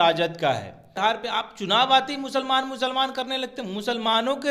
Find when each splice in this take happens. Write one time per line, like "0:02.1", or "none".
0:01.0